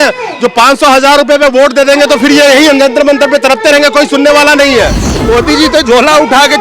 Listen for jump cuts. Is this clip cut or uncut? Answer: cut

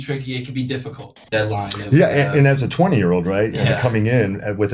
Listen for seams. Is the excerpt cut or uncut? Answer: cut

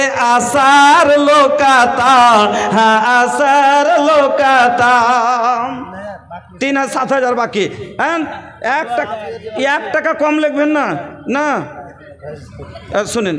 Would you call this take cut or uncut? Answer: uncut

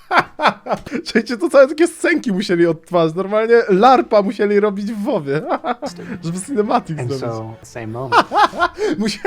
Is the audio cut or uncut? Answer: cut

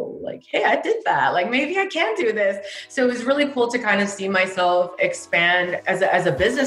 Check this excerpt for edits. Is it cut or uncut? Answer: cut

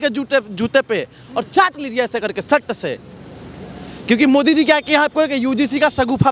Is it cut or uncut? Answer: uncut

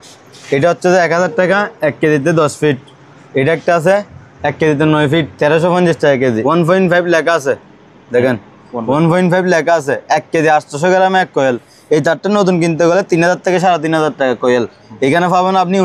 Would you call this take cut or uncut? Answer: cut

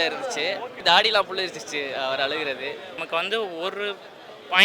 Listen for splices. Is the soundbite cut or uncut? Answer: cut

